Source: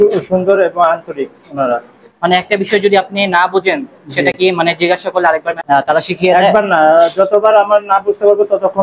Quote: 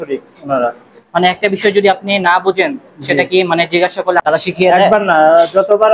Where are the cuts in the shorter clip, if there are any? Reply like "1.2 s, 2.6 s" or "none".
4.2 s